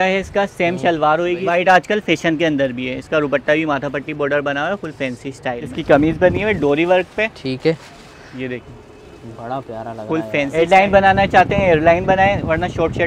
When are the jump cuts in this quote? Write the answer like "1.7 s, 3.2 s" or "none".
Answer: 1.4 s, 5.7 s, 10.5 s